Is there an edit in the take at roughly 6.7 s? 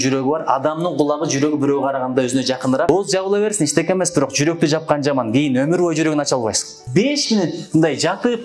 yes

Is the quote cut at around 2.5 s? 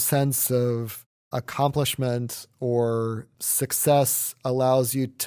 no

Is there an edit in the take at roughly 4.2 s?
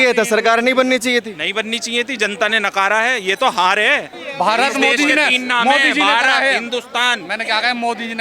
yes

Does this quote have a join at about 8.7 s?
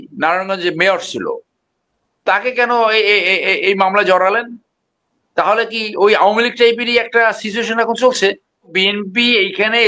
yes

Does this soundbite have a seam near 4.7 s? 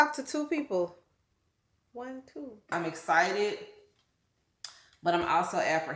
no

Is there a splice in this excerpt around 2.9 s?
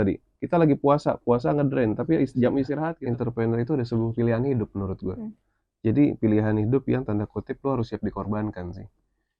yes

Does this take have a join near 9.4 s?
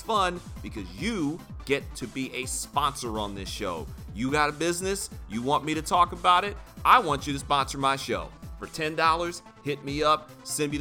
no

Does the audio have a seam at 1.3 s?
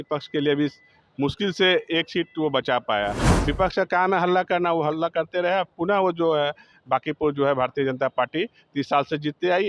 no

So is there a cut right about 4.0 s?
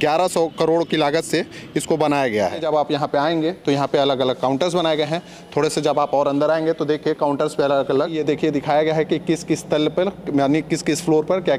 no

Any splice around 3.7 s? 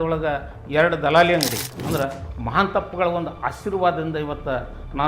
no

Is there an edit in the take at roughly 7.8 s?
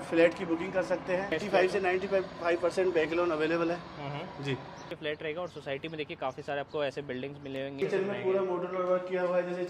yes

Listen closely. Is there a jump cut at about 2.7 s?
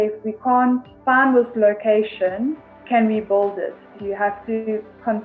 yes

